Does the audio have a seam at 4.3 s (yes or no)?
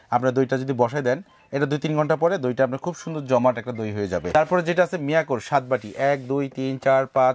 yes